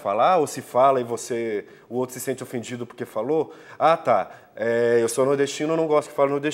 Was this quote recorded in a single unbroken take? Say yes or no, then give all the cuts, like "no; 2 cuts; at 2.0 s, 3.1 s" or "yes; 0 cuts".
yes; 0 cuts